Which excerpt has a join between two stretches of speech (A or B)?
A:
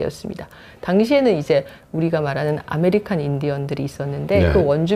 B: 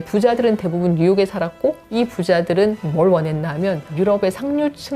B